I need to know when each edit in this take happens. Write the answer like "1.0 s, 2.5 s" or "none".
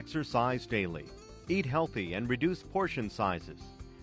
none

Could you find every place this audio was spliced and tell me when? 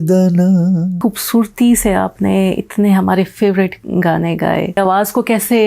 1.0 s, 4.8 s

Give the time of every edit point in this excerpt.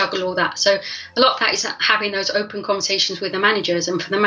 none

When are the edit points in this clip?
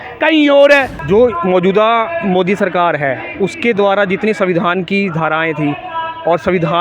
0.9 s

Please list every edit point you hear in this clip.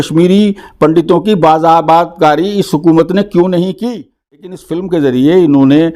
4.7 s

